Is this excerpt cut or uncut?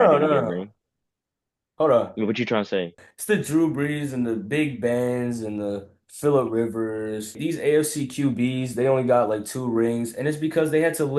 cut